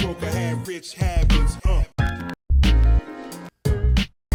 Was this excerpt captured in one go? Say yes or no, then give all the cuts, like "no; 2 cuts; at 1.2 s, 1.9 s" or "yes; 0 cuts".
yes; 0 cuts